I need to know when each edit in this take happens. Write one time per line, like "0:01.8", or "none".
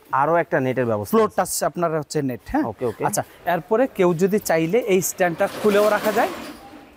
none